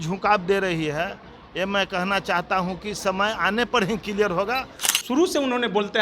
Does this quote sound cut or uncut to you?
cut